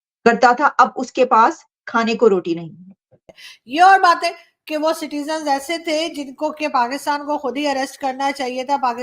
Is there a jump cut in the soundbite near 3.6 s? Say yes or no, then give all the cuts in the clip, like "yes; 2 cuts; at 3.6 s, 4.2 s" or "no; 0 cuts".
yes; 1 cut; at 3.6 s